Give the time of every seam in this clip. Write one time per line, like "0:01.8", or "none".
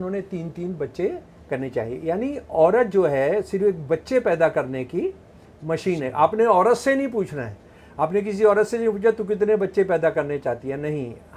none